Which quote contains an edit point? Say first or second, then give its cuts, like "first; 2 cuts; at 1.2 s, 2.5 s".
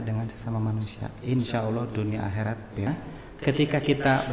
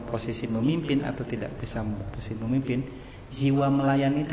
first; 1 cut; at 2.9 s